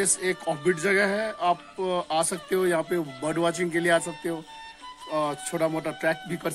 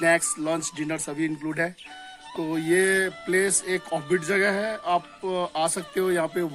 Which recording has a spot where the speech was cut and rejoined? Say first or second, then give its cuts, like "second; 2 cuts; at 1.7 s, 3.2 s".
second; 1 cut; at 2.4 s